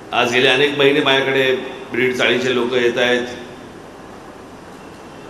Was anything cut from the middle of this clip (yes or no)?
no